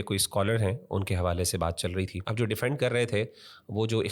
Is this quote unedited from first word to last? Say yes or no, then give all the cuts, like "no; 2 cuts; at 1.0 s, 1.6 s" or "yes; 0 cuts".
no; 1 cut; at 2.2 s